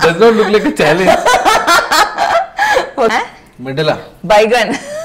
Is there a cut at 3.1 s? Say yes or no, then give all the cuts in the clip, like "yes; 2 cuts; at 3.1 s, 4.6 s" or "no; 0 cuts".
yes; 1 cut; at 3.1 s